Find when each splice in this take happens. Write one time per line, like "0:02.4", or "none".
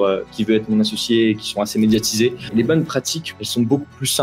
0:02.4
0:03.2